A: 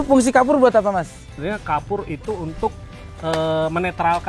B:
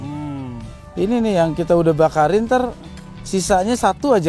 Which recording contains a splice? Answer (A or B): A